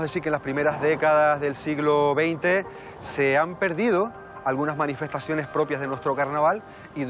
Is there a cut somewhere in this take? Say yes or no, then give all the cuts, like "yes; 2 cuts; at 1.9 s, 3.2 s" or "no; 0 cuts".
no; 0 cuts